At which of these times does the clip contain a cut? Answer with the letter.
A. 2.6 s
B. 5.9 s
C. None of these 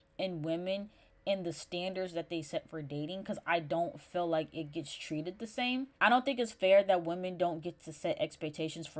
B